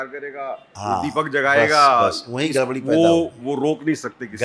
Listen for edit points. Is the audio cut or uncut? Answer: uncut